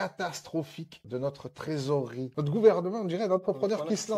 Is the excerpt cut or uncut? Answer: uncut